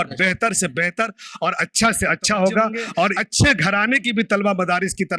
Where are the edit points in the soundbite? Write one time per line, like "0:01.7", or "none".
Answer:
0:03.1